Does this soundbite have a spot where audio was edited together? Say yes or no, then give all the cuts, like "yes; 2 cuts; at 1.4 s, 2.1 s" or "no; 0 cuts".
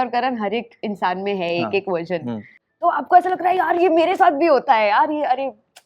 yes; 1 cut; at 2.6 s